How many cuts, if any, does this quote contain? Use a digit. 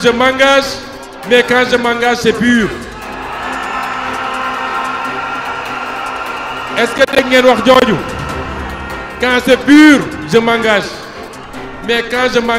0